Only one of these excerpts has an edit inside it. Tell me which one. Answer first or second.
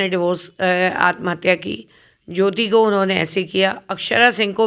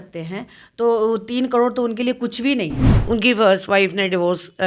second